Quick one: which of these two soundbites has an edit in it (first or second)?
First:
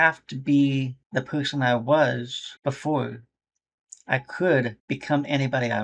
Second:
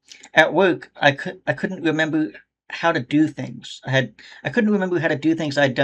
first